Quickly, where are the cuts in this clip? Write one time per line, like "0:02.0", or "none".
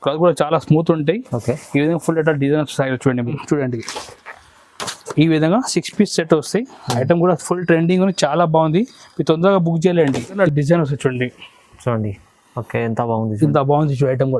0:03.3
0:10.4